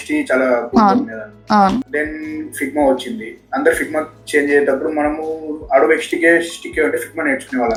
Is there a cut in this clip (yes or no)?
no